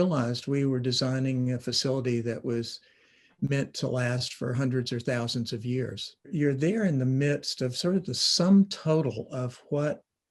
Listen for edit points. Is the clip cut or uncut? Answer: cut